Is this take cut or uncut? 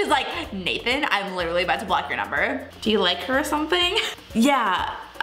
cut